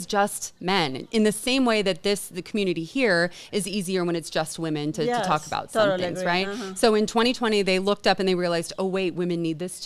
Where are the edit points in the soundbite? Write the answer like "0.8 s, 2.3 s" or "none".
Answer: none